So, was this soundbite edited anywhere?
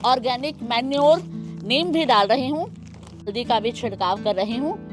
yes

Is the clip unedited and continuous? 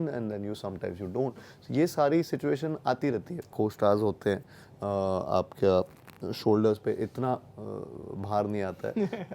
no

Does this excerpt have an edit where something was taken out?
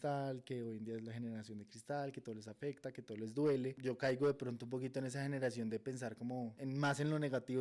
yes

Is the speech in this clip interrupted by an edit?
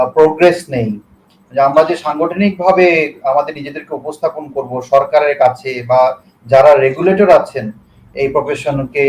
no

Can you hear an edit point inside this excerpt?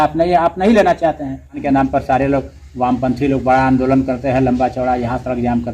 yes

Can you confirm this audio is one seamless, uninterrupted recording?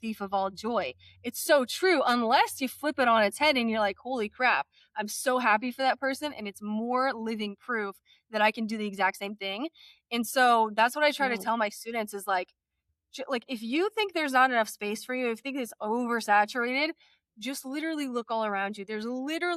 yes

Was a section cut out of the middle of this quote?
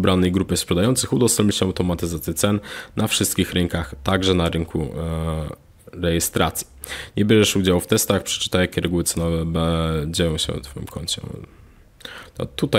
no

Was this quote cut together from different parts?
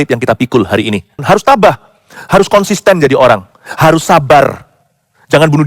yes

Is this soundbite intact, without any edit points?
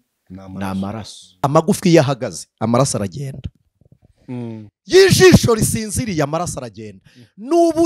no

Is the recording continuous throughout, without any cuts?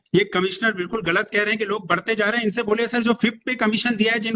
yes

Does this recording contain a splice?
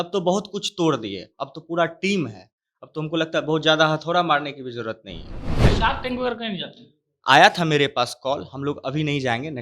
yes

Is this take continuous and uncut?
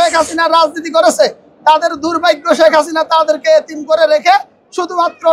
yes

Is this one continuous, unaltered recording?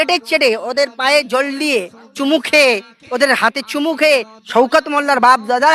no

